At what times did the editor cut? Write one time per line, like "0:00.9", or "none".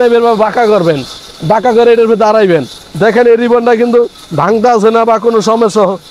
none